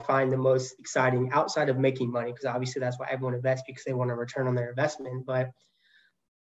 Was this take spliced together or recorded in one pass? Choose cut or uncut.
uncut